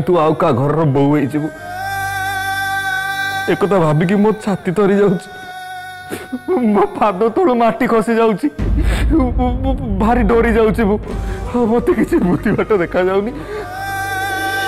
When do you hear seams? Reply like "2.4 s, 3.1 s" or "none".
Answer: 13.7 s